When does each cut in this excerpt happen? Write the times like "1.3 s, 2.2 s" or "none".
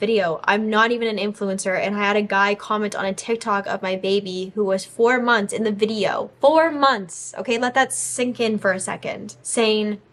none